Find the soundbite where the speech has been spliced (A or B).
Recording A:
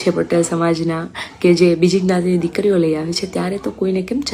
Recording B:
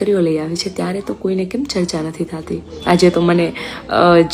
B